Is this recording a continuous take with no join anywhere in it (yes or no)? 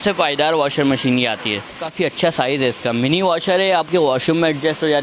no